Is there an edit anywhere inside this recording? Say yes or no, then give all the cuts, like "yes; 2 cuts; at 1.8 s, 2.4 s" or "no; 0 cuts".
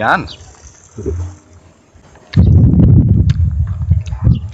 no; 0 cuts